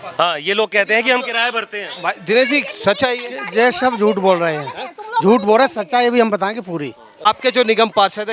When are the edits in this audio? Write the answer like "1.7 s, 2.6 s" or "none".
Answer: 7.2 s